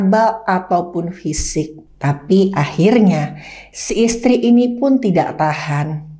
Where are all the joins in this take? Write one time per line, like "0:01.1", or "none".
0:01.8